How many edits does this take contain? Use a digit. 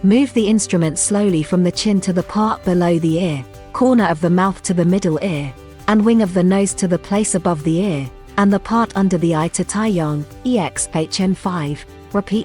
0